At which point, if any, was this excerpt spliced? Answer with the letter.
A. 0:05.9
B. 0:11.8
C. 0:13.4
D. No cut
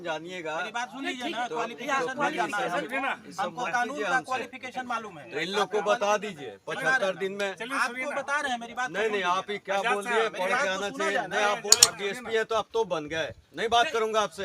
B